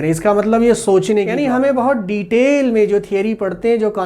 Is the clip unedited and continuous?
no; 1 cut; at 1.3 s

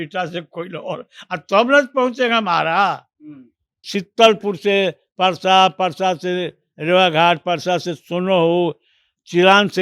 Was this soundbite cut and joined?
yes; 1 cut; at 3.9 s

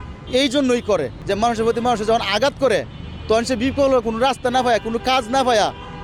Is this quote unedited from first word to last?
no; 1 cut; at 1.1 s

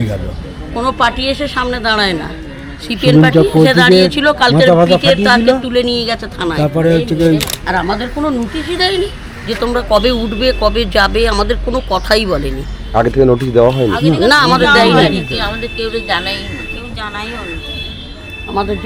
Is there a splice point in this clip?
yes; 1 cut; at 7.5 s

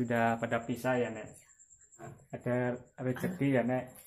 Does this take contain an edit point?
yes; 1 cut; at 2.0 s

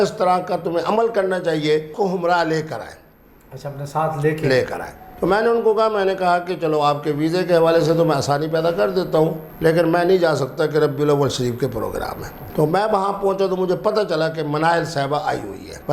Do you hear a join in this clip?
yes; 1 cut; at 1.9 s

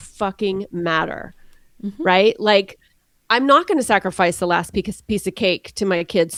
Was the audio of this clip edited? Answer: no; 0 cuts

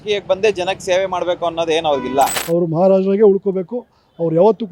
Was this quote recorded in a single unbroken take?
no; 1 cut; at 2.4 s

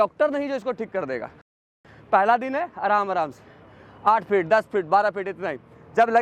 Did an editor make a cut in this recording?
yes; 1 cut; at 1.9 s

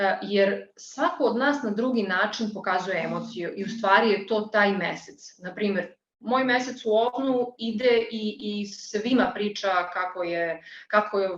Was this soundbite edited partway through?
no; 0 cuts

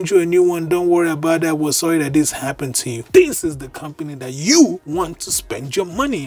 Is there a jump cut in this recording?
no; 0 cuts

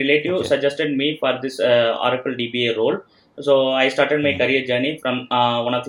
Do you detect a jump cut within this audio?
no; 0 cuts

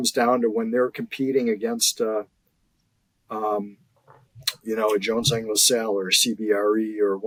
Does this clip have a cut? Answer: no; 0 cuts

